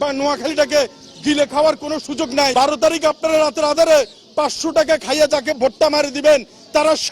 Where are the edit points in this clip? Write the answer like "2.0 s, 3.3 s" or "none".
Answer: 2.5 s